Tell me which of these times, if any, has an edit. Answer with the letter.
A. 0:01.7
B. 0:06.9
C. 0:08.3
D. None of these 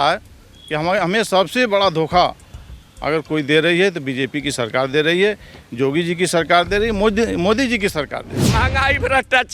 C